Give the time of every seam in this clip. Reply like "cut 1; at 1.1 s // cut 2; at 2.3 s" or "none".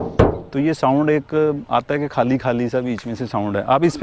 none